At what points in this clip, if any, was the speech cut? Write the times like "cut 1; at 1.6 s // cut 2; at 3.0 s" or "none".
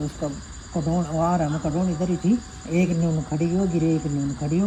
none